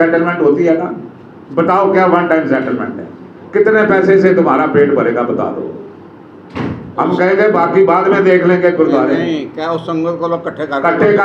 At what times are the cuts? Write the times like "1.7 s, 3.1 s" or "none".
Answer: none

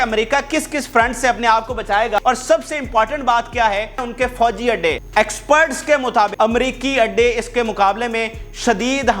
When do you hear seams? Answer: 2.2 s, 4.0 s, 5.0 s, 6.3 s

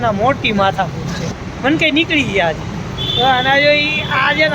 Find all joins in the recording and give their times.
1.4 s

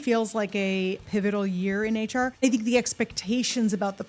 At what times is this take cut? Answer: 1.0 s, 2.4 s

